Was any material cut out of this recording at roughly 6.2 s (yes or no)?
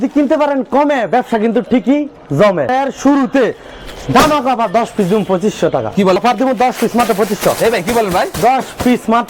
yes